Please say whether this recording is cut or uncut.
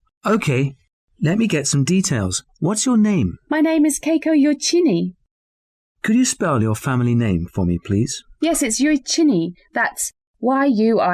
uncut